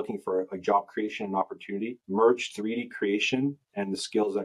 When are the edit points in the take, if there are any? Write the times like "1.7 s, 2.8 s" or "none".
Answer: none